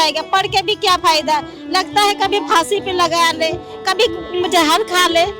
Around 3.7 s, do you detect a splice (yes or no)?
no